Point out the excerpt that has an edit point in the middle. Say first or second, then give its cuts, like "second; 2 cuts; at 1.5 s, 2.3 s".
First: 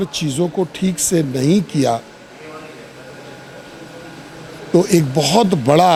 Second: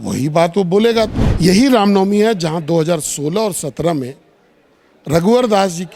second; 1 cut; at 1.2 s